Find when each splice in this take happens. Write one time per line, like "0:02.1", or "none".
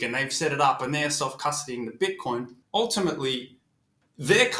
0:02.6

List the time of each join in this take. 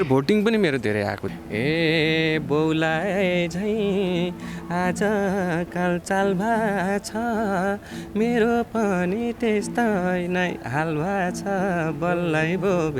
0:01.2

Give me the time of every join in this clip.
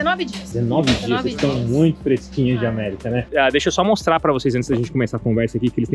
0:03.2

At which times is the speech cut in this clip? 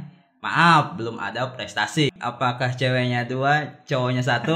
0:02.1

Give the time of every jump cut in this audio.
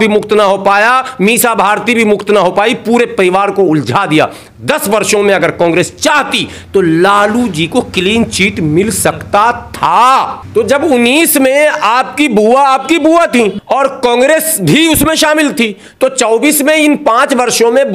0:10.4
0:13.6

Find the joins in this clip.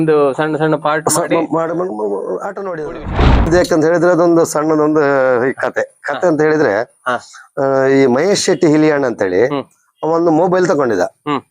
0:03.5

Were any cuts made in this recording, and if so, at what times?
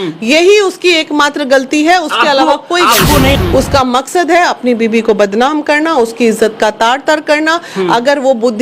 0:03.4

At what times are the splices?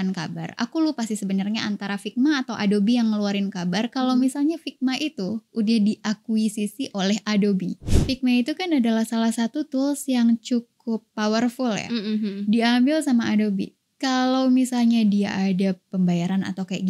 0:07.9

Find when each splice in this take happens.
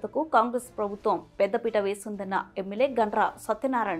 none

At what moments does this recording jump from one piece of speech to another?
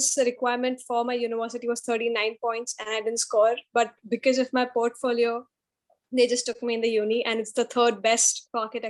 none

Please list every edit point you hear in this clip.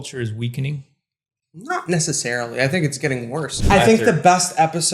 0:03.6

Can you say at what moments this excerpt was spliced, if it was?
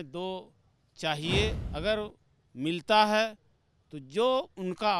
0:01.7

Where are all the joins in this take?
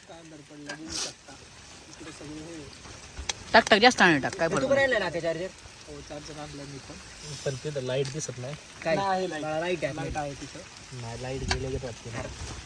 none

